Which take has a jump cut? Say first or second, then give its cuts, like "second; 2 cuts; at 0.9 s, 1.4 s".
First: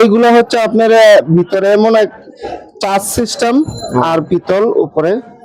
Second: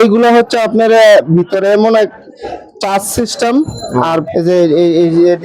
second; 1 cut; at 4.3 s